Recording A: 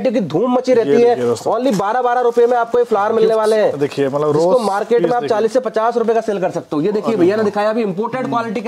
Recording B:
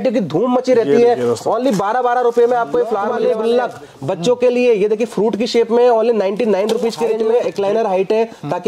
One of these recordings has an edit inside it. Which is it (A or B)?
B